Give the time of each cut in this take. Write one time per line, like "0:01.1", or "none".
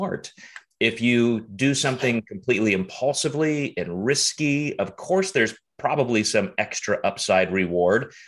none